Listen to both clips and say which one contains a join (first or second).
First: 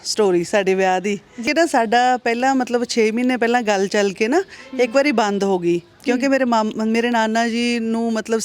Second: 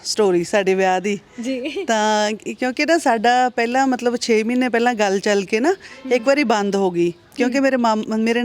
first